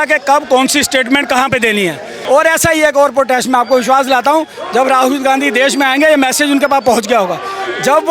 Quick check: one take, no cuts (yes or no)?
no